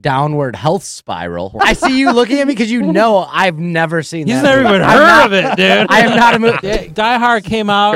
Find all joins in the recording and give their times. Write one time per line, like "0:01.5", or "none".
0:01.5
0:06.6